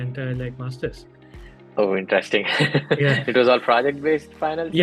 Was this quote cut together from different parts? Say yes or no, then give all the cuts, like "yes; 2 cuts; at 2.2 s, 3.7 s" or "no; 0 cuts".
no; 0 cuts